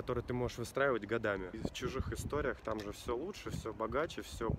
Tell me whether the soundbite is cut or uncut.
cut